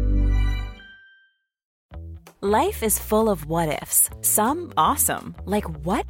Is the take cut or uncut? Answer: cut